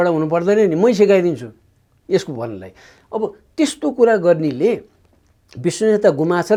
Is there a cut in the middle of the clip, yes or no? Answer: no